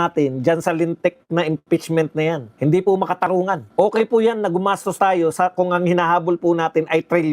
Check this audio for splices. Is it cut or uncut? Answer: cut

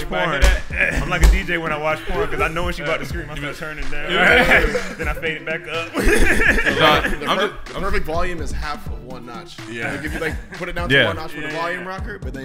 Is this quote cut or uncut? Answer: uncut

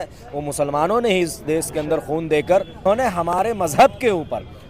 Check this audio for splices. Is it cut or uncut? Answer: cut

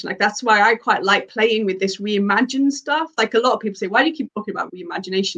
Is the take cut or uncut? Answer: uncut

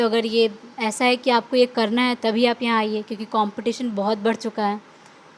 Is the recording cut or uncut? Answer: uncut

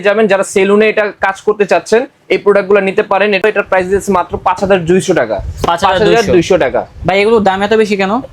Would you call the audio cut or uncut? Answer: uncut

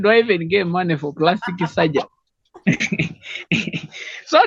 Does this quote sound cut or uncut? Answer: uncut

